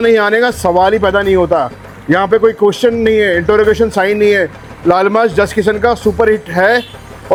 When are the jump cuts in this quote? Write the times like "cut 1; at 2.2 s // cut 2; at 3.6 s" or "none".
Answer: none